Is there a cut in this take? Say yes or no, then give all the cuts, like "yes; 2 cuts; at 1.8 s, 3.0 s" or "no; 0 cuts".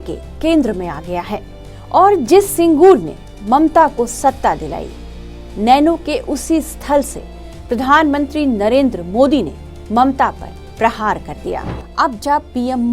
yes; 1 cut; at 11.8 s